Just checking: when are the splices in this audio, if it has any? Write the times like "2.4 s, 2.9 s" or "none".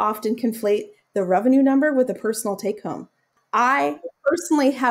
1.0 s, 3.4 s